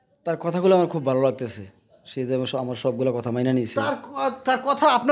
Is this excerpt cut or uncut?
uncut